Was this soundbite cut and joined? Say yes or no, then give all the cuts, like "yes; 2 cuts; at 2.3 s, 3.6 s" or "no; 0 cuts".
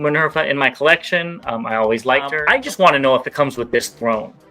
yes; 1 cut; at 2.4 s